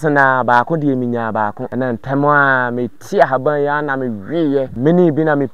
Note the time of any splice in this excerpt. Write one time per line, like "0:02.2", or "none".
0:01.6
0:04.7